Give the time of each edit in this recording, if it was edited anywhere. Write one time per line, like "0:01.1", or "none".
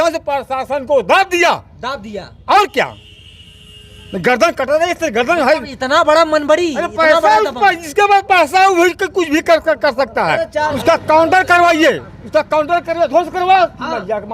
0:10.7